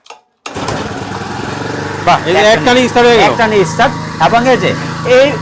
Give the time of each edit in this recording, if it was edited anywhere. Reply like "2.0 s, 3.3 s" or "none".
none